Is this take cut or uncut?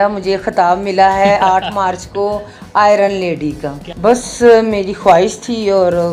cut